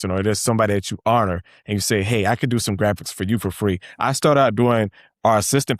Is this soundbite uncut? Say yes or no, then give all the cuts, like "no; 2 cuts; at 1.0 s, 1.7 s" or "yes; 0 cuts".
yes; 0 cuts